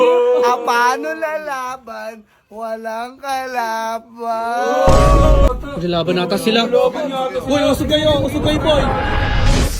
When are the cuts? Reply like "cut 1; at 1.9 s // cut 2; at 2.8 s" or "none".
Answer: cut 1; at 5.5 s